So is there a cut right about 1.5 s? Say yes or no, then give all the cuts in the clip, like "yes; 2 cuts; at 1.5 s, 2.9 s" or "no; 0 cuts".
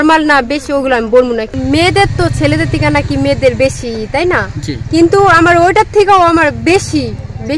yes; 1 cut; at 1.5 s